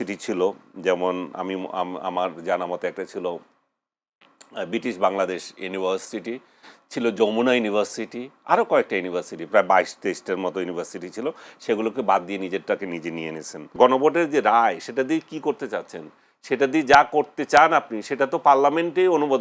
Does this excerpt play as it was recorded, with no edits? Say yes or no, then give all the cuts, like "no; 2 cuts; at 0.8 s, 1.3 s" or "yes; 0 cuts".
no; 1 cut; at 13.7 s